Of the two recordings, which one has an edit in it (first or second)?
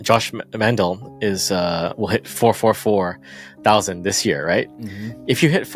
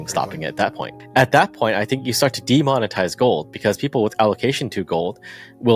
second